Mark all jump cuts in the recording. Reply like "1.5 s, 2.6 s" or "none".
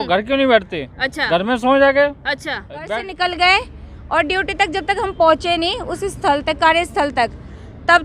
2.9 s